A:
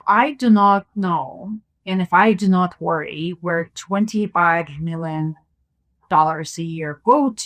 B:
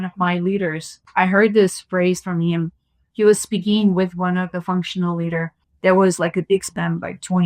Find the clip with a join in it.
B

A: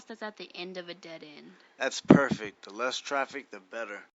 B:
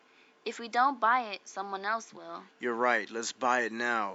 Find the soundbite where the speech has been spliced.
A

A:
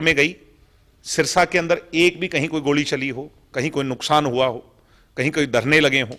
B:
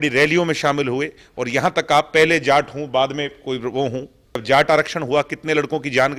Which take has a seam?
B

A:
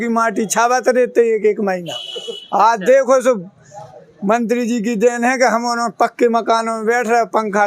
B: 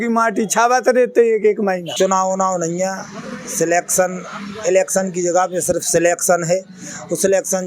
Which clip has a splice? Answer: B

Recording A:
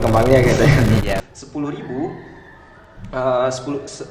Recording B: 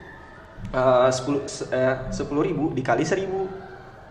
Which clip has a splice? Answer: A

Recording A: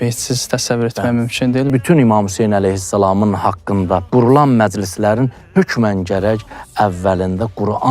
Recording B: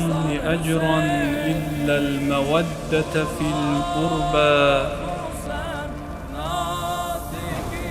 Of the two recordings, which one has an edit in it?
A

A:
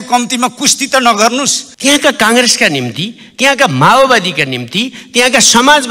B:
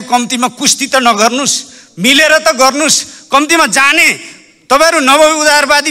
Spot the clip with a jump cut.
A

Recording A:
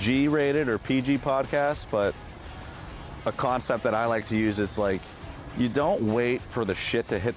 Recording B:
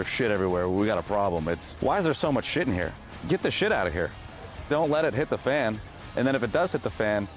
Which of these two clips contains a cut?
B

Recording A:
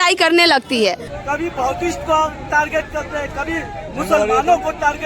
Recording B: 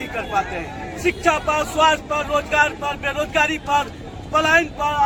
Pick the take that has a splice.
A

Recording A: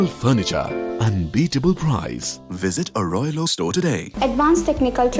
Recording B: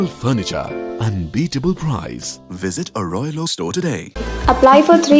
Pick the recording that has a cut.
A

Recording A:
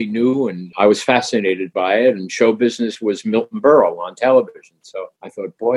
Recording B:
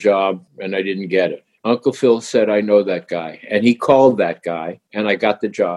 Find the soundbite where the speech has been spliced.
B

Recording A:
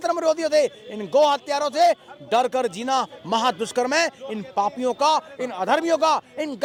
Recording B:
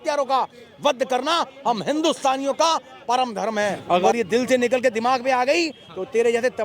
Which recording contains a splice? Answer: B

